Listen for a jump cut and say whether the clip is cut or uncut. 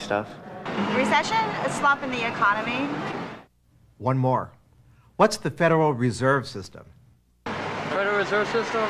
cut